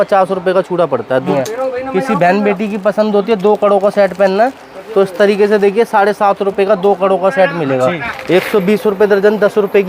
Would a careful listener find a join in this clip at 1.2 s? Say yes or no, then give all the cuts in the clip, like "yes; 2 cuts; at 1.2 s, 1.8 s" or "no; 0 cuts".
yes; 2 cuts; at 1.2 s, 8.1 s